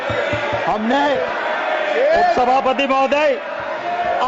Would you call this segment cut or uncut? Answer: uncut